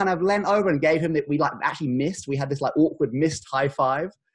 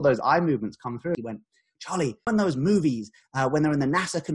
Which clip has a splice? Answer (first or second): second